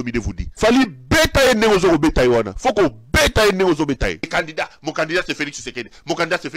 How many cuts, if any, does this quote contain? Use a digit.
0